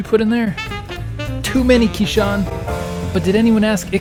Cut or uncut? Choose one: uncut